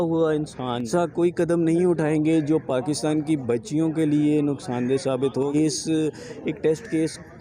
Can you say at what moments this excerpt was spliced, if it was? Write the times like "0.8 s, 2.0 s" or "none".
0.9 s, 5.5 s